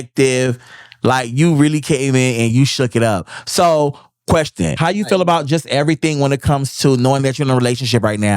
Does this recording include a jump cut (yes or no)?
yes